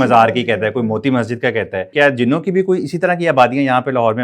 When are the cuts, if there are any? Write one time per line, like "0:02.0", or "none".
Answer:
0:01.9